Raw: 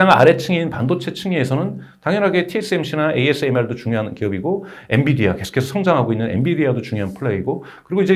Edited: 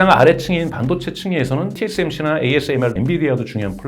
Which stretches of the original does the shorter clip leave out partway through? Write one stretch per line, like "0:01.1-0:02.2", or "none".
0:01.8-0:02.5
0:03.7-0:06.3